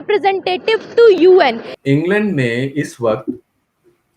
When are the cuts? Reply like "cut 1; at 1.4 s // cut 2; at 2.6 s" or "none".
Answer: cut 1; at 1.7 s

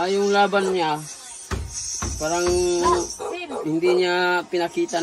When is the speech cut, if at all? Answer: none

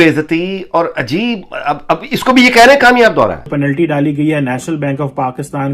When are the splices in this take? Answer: cut 1; at 3.5 s

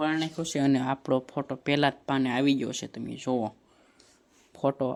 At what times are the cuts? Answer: none

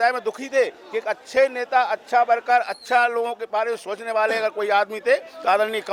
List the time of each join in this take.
none

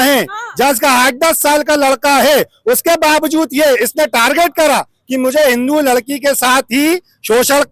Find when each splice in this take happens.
none

